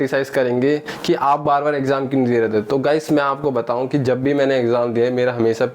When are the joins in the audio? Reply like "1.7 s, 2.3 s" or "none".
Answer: none